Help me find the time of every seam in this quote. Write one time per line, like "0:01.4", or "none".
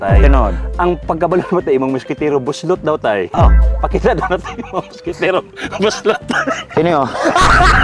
none